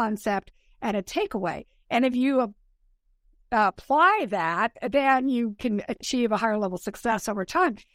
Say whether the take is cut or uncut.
uncut